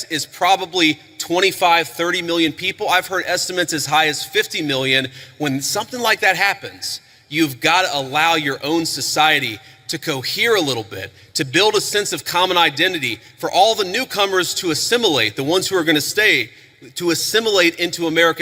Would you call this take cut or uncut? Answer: uncut